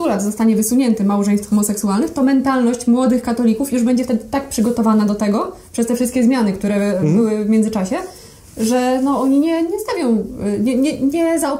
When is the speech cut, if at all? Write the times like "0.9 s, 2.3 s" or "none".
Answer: none